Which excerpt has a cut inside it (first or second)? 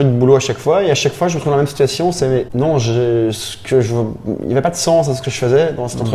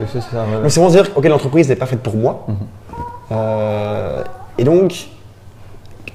first